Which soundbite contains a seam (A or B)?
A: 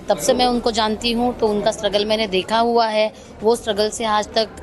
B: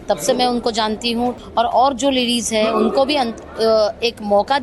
B